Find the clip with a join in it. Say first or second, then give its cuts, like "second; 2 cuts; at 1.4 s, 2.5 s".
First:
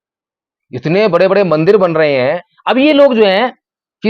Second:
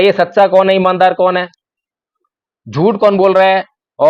first; 1 cut; at 2.5 s